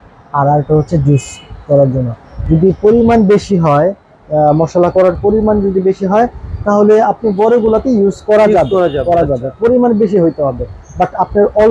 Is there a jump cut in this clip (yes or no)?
no